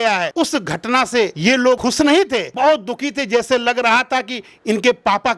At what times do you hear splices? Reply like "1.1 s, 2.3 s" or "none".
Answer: none